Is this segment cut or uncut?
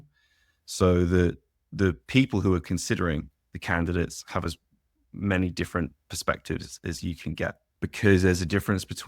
cut